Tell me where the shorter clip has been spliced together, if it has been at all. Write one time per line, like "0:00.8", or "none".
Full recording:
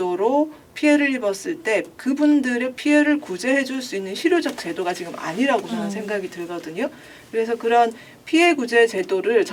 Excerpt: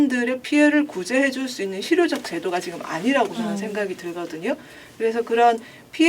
none